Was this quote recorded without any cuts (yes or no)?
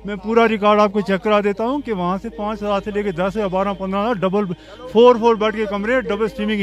yes